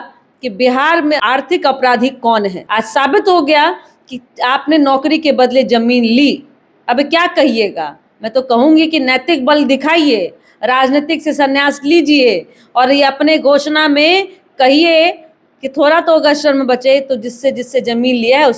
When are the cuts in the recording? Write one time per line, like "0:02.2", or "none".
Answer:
0:01.2
0:02.6